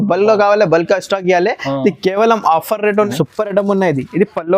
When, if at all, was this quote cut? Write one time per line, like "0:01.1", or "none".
0:02.9

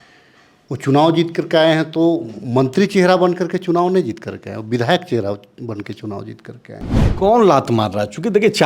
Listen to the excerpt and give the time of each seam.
0:07.0

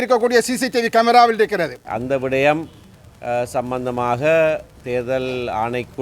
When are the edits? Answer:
0:01.9

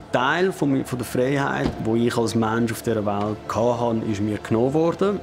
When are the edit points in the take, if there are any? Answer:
0:01.8
0:03.4

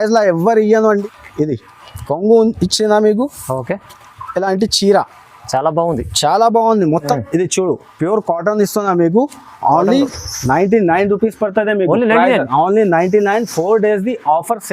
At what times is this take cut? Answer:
0:01.0
0:07.2

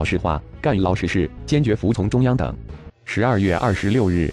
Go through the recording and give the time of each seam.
0:01.3

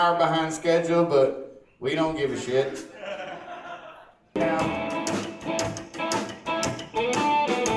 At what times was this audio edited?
0:04.4

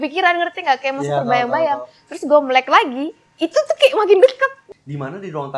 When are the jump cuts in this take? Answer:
0:04.6

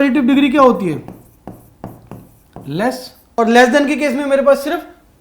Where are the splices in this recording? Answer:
0:03.2

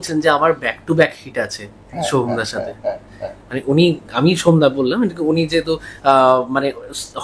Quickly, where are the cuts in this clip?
none

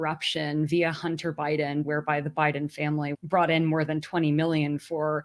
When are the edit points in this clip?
0:03.1

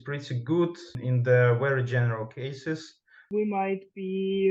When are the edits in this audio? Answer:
0:01.0
0:03.2

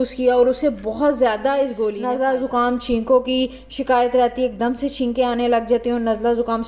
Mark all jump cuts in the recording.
0:01.9

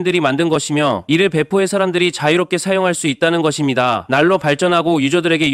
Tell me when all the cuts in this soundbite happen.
0:01.0
0:04.0

